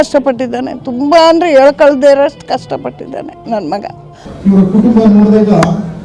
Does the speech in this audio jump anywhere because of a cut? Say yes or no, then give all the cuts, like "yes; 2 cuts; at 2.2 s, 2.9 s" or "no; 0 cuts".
yes; 1 cut; at 4.1 s